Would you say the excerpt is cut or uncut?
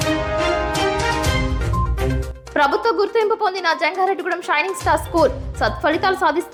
uncut